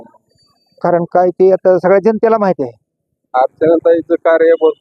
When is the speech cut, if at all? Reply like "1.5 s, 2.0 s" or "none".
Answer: 3.2 s